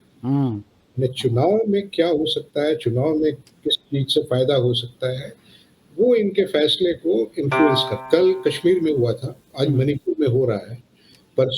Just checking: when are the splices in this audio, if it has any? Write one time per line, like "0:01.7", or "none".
0:07.9